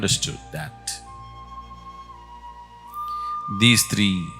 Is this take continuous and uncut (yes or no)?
yes